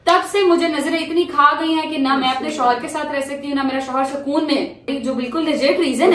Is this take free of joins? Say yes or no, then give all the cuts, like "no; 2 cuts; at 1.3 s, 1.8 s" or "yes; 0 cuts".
no; 1 cut; at 4.9 s